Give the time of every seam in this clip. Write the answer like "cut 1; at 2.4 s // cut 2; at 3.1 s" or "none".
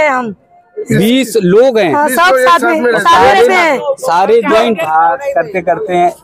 cut 1; at 4.8 s